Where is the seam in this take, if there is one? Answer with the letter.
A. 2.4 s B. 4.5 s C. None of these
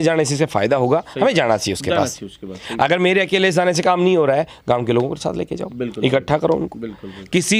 C